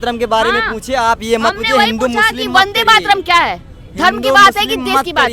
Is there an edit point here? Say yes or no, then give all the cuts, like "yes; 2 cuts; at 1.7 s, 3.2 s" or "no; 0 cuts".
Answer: no; 0 cuts